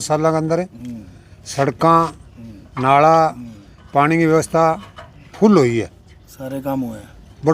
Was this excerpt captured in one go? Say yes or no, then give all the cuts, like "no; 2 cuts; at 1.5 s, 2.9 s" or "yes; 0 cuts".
yes; 0 cuts